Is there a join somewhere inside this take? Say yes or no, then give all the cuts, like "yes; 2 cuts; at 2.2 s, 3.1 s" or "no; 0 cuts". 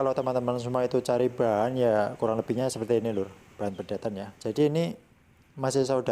yes; 1 cut; at 4.3 s